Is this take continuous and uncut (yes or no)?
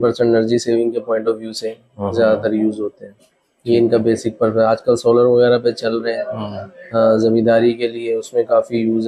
yes